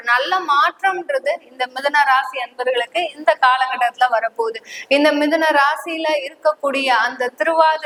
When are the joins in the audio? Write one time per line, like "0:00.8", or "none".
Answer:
none